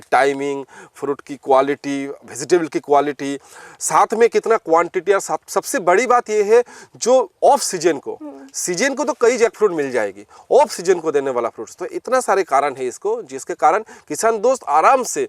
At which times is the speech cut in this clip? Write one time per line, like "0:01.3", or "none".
none